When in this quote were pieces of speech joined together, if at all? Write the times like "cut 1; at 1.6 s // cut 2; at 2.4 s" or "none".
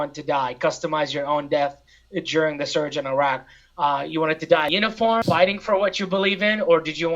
none